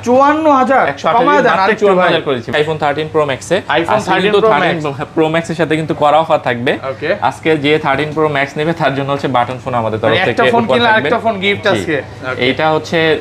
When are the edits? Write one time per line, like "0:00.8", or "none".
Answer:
0:02.5